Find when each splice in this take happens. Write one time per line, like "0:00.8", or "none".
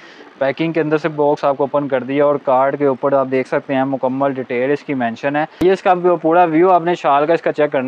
0:05.6